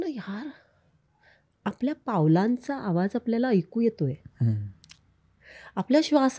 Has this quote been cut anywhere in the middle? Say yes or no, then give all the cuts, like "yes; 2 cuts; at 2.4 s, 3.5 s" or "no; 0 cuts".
no; 0 cuts